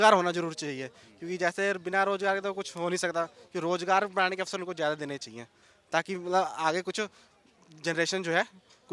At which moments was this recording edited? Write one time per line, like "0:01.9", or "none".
none